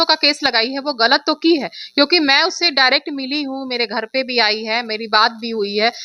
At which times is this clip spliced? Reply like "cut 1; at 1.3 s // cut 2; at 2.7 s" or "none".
none